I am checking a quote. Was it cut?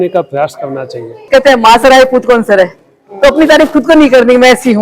yes; 1 cut; at 1.1 s

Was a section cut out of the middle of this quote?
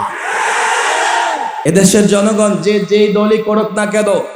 yes; 1 cut; at 1.6 s

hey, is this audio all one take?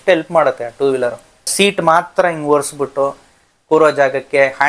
no; 1 cut; at 1.5 s

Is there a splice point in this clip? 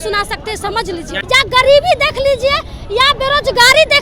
yes; 1 cut; at 1.1 s

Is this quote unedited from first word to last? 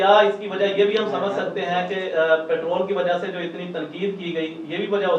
yes; 0 cuts

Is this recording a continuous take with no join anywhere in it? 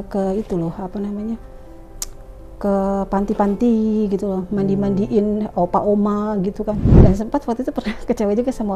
no; 1 cut; at 6.9 s

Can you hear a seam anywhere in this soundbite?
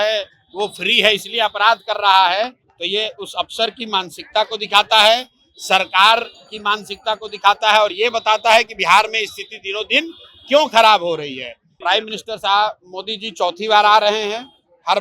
yes; 1 cut; at 11.7 s

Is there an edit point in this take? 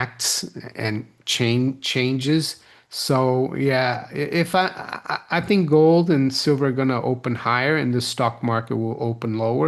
no; 0 cuts

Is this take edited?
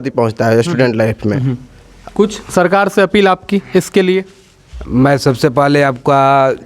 no; 0 cuts

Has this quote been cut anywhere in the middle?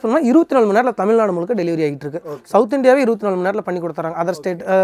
no; 0 cuts

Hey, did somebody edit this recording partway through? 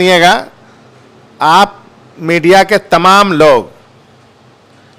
no; 0 cuts

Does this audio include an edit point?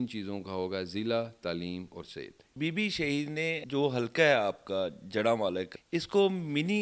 yes; 3 cuts; at 2.5 s, 3.6 s, 5.7 s

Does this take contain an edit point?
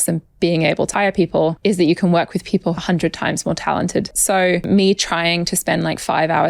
yes; 3 cuts; at 1.3 s, 2.8 s, 4.6 s

